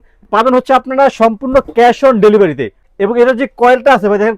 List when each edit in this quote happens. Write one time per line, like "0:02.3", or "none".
0:02.8